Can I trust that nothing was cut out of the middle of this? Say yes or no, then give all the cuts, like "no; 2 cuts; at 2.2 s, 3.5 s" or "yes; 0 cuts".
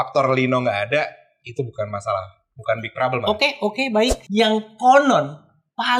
no; 1 cut; at 4.2 s